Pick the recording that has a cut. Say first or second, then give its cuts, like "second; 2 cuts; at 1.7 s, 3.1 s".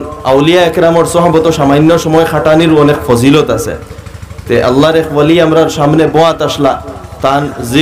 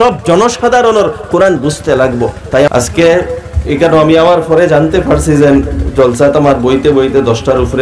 second; 1 cut; at 2.7 s